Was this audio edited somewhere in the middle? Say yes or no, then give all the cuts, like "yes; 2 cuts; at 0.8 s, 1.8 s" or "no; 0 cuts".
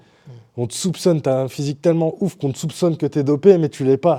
no; 0 cuts